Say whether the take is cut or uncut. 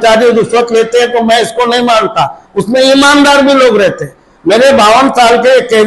uncut